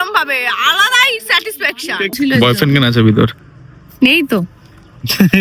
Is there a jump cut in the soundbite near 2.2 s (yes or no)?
yes